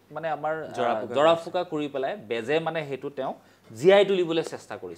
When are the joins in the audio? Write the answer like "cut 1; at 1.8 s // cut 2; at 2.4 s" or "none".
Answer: none

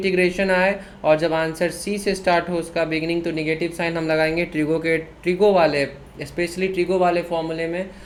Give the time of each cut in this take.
none

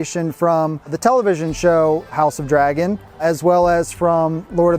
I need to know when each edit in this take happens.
none

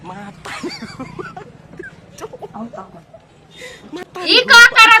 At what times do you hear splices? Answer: cut 1; at 4.0 s

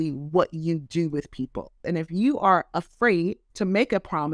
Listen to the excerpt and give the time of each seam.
cut 1; at 1.8 s // cut 2; at 3.4 s

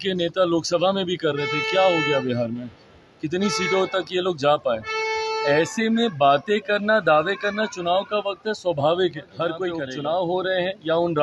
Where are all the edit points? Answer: cut 1; at 9.8 s

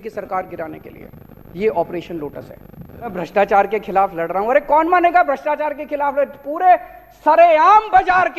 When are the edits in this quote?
cut 1; at 3.1 s

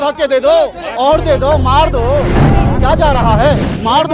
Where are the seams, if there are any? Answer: none

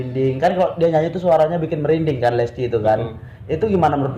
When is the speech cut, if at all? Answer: none

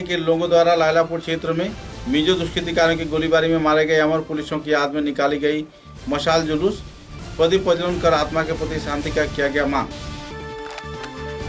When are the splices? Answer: none

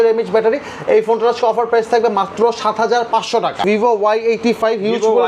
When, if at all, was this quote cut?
cut 1; at 3.6 s

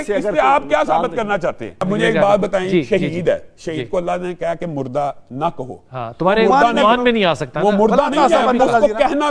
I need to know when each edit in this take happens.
cut 1; at 1.8 s

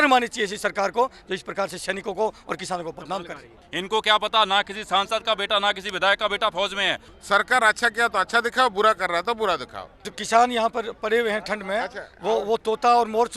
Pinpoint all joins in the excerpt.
cut 1; at 3.6 s // cut 2; at 7.1 s // cut 3; at 10.1 s

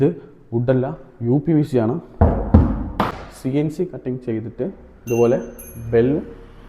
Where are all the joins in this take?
cut 1; at 3.1 s

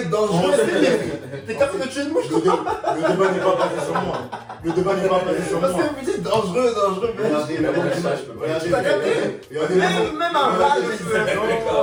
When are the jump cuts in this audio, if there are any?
none

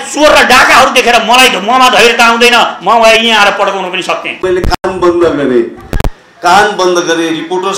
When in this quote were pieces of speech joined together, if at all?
cut 1; at 4.3 s

